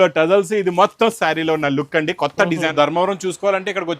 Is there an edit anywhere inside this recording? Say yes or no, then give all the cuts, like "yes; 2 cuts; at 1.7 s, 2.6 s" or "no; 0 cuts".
yes; 1 cut; at 2.7 s